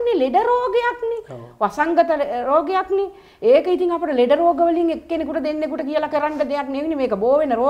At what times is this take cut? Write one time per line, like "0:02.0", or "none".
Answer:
none